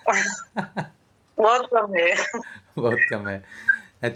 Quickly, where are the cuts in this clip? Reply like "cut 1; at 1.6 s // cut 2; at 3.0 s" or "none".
none